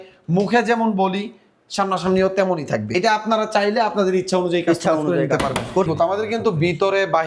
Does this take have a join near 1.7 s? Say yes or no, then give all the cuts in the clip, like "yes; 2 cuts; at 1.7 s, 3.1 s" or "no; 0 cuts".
no; 2 cuts; at 2.9 s, 5.9 s